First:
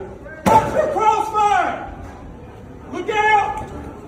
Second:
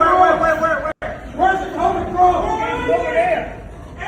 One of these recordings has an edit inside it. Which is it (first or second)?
second